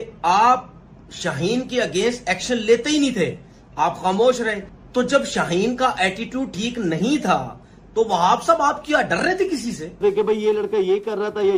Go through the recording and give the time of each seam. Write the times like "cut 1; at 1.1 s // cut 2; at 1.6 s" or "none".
cut 1; at 4.7 s // cut 2; at 10.0 s

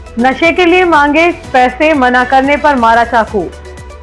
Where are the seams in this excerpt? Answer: none

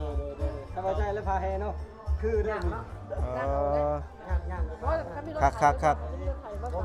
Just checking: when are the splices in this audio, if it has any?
none

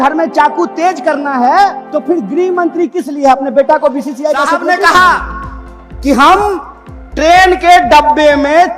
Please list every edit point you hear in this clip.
cut 1; at 1.9 s // cut 2; at 4.6 s

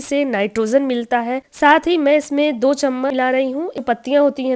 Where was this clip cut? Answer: cut 1; at 1.4 s // cut 2; at 3.3 s

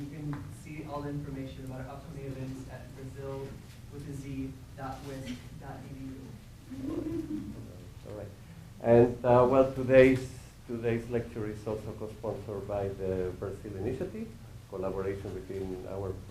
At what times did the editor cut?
cut 1; at 5.4 s

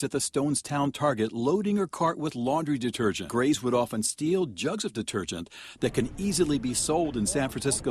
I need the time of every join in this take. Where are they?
cut 1; at 3.3 s

